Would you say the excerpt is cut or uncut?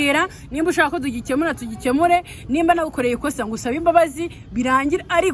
uncut